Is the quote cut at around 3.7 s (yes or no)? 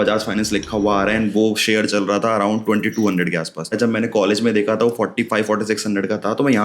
yes